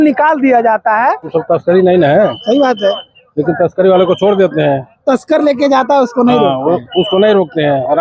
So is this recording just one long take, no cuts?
no; 1 cut; at 1.3 s

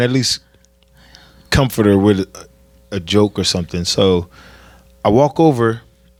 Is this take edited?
no; 0 cuts

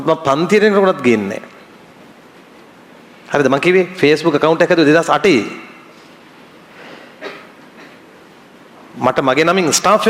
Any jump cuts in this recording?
no; 0 cuts

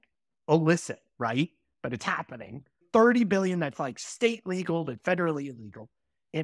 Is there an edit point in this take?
yes; 1 cut; at 2.8 s

